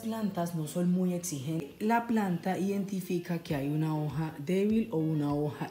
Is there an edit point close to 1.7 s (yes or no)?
yes